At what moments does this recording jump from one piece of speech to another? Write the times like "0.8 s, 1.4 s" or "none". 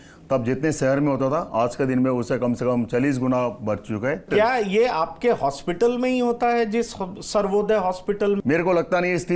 4.3 s, 8.4 s